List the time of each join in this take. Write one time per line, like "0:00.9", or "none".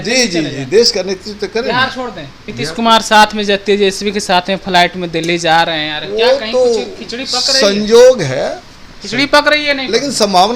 0:02.5